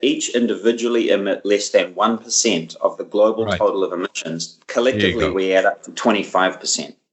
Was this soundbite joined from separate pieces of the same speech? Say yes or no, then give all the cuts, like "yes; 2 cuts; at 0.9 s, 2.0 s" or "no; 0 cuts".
no; 0 cuts